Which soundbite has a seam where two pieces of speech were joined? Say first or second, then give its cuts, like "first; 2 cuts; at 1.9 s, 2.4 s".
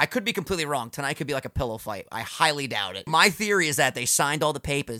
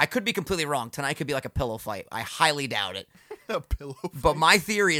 first; 1 cut; at 3.1 s